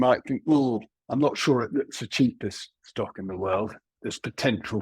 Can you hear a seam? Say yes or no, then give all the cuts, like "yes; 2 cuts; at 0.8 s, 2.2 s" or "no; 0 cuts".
yes; 1 cut; at 0.9 s